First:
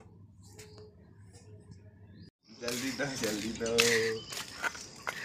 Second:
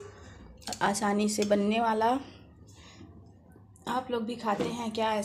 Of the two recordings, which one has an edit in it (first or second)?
first